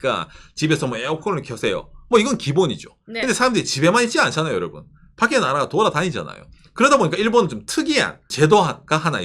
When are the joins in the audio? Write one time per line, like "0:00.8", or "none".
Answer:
0:08.3